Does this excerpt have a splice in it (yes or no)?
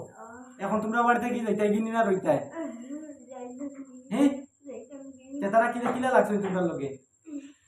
no